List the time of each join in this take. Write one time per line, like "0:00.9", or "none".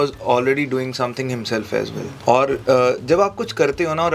0:02.0